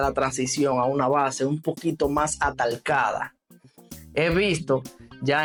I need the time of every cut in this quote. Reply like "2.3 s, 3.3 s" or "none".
none